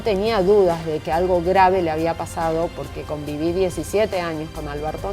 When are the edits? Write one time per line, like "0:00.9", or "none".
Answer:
none

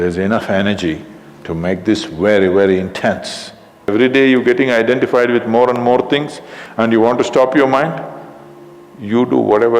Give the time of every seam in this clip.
0:03.9

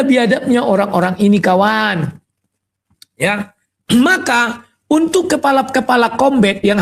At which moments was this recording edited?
none

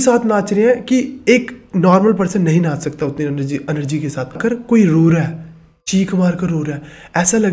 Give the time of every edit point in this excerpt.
0:04.4

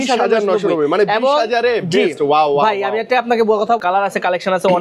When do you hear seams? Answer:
0:03.8

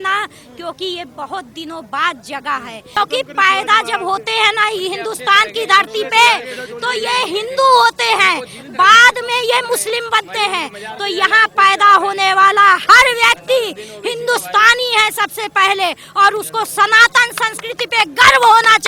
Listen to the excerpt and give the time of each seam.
0:03.0

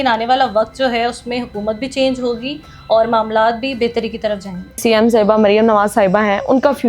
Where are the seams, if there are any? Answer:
0:04.8

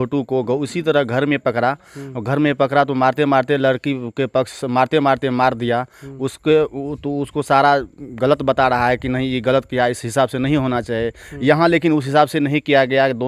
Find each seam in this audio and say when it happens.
none

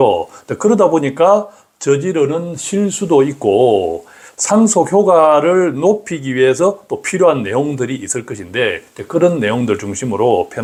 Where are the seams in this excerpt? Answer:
none

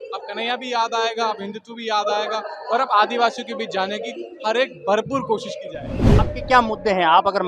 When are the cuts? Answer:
0:06.2

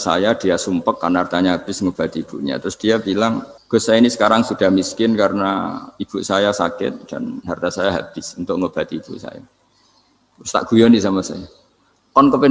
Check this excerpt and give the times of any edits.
0:03.5

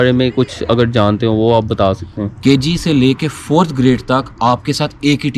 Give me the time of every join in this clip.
0:02.3

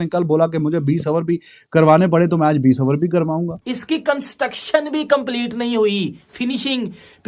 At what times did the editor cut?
0:03.6

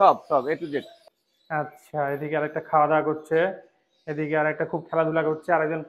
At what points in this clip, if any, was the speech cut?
0:01.0

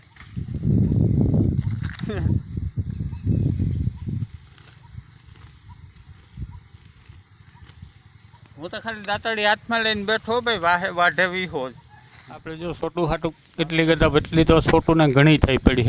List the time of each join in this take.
0:12.5

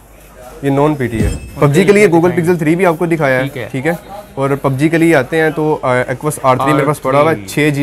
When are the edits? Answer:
0:01.4

